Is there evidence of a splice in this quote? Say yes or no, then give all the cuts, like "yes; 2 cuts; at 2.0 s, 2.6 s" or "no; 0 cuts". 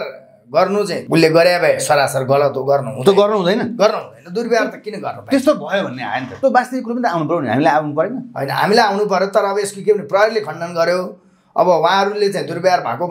yes; 2 cuts; at 1.0 s, 6.3 s